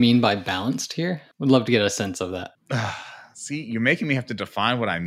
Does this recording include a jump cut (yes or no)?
yes